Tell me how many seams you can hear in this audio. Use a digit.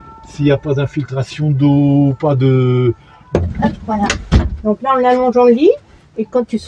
1